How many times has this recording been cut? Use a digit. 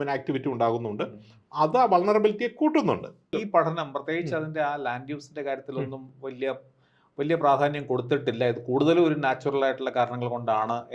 1